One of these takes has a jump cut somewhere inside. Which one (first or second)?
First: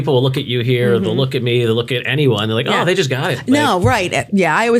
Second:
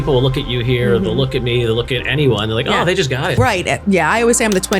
second